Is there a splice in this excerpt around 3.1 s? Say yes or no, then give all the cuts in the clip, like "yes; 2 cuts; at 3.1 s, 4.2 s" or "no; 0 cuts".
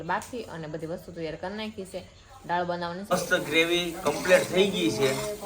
yes; 1 cut; at 3.1 s